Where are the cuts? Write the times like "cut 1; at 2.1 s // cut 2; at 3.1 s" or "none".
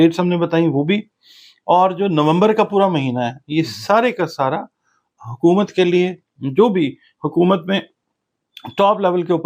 none

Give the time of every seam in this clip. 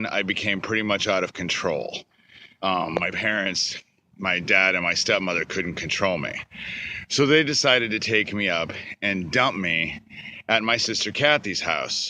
none

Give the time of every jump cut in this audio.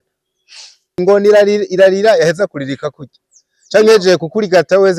cut 1; at 1.0 s

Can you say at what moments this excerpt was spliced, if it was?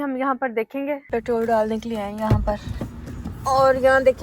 cut 1; at 1.0 s

